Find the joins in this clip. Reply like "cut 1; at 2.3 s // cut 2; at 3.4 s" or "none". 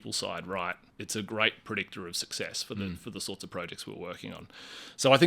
cut 1; at 0.9 s